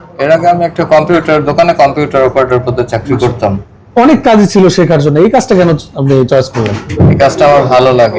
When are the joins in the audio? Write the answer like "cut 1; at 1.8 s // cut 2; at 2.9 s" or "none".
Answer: cut 1; at 3.6 s // cut 2; at 6.8 s